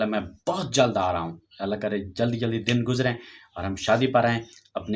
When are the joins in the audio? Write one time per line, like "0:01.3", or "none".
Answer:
none